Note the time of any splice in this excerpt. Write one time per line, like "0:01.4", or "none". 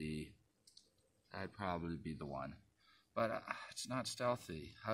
none